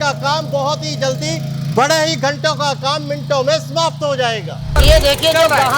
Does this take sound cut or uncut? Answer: cut